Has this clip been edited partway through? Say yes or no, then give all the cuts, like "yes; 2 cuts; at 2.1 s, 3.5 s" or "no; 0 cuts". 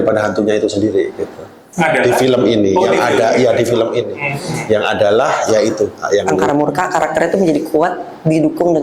yes; 1 cut; at 6.4 s